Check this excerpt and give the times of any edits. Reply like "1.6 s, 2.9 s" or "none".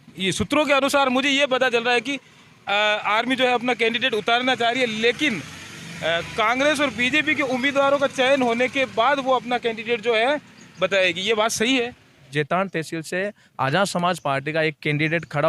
12.3 s